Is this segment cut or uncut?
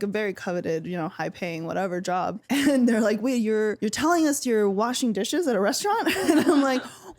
cut